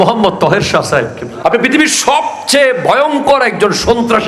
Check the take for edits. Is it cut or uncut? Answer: cut